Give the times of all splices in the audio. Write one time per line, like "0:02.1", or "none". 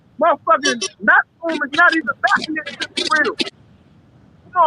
0:03.6

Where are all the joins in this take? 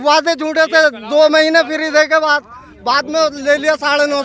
none

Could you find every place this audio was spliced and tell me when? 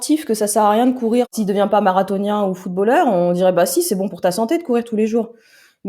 0:01.3

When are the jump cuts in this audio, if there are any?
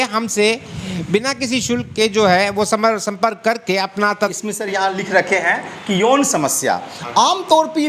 0:04.3

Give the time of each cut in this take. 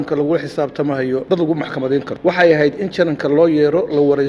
0:01.2
0:02.1

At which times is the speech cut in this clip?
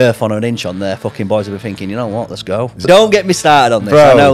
0:02.9

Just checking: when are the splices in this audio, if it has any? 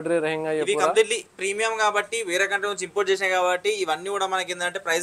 none

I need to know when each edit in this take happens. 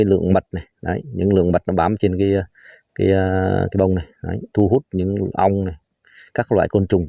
none

